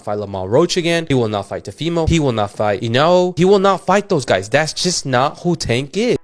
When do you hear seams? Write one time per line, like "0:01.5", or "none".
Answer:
none